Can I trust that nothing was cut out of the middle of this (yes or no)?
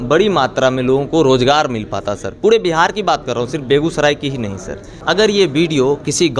no